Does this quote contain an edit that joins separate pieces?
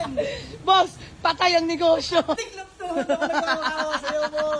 yes; 1 cut; at 2.4 s

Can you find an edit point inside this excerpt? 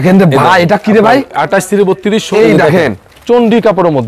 yes; 1 cut; at 2.3 s

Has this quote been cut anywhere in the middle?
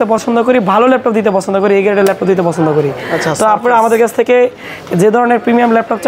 no; 0 cuts

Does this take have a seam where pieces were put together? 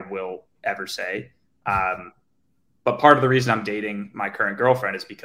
no; 0 cuts

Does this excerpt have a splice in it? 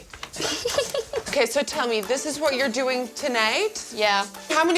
yes; 1 cut; at 1.3 s

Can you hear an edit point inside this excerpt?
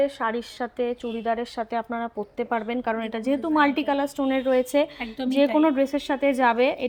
no; 0 cuts

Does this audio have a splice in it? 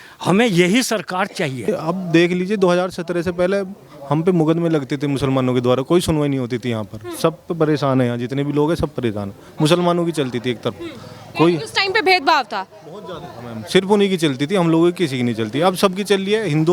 yes; 1 cut; at 1.7 s

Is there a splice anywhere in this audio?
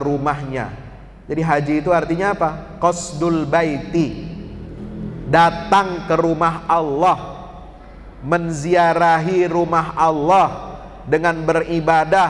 no; 0 cuts

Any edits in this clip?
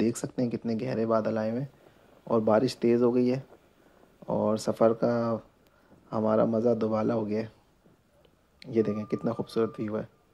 no; 0 cuts

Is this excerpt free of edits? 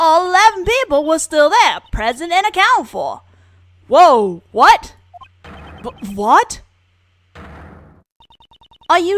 yes; 0 cuts

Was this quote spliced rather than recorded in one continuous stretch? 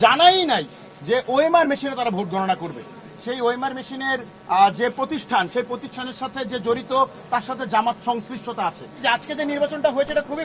yes; 2 cuts; at 3.1 s, 9.0 s

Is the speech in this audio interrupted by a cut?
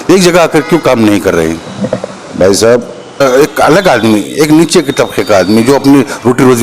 yes; 1 cut; at 3.2 s

